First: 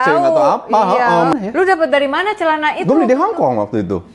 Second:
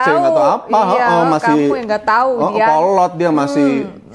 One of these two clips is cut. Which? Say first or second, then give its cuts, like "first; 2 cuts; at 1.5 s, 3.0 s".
first; 1 cut; at 1.3 s